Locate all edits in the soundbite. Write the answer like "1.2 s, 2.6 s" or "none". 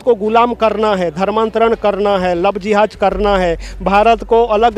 none